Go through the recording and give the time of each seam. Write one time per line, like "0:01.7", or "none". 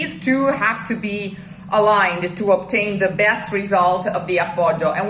none